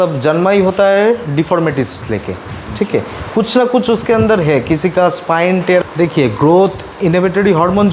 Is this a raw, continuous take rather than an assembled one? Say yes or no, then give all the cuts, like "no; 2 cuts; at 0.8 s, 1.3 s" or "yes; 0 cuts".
no; 1 cut; at 5.8 s